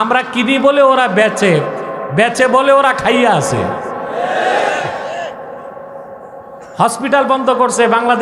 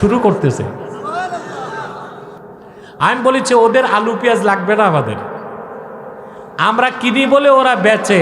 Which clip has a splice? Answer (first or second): second